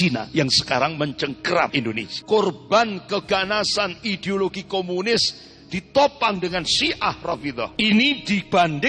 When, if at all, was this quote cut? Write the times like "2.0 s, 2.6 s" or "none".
1.8 s, 7.7 s

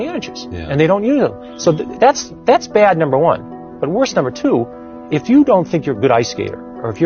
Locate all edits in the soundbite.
none

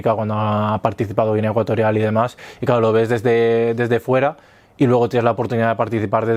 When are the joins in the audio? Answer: none

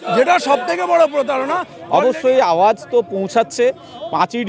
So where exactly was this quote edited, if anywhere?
1.7 s

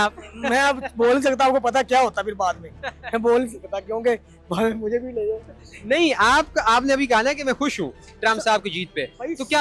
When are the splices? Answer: none

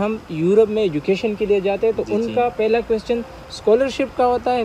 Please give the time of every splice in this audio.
none

